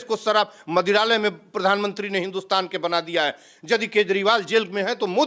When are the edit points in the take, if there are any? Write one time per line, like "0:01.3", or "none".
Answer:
none